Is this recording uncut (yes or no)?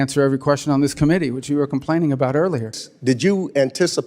no